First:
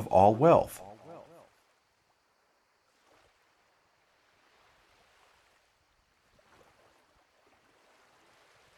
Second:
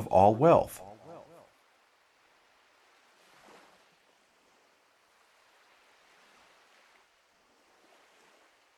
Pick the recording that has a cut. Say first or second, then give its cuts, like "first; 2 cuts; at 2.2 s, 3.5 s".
second; 1 cut; at 1.5 s